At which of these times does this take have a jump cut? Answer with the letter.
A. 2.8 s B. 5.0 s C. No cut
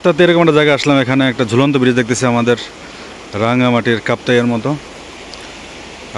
C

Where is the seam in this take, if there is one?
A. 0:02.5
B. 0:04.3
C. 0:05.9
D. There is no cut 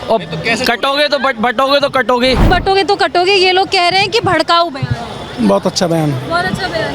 A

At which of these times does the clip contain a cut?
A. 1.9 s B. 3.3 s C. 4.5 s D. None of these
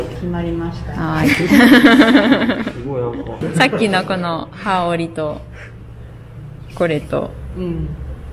B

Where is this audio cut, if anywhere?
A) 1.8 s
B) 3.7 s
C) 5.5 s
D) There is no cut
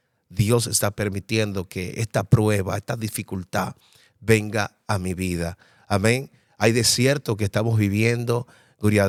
D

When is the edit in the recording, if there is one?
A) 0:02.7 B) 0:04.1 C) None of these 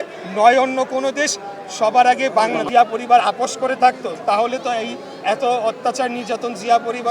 A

